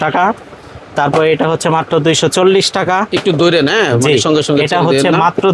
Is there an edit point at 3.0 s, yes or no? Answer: no